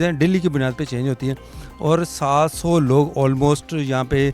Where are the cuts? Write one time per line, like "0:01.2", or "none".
none